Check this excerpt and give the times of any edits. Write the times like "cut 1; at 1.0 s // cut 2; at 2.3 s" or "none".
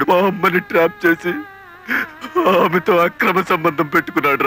none